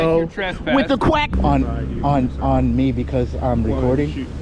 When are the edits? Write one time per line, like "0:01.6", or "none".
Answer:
0:01.3